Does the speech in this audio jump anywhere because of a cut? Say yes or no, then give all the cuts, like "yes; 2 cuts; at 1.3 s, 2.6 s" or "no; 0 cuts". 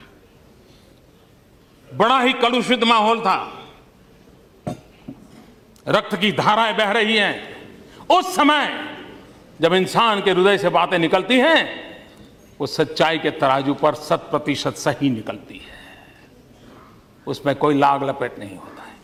no; 0 cuts